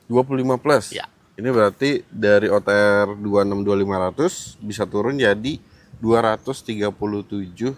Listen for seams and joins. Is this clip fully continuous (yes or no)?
yes